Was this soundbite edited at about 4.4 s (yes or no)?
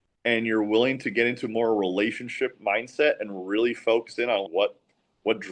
yes